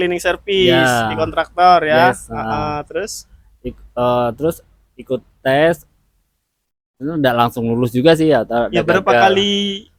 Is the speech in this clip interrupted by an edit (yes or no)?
no